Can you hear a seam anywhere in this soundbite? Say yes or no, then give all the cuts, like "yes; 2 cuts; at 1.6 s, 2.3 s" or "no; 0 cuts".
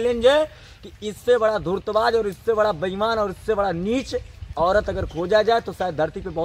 no; 0 cuts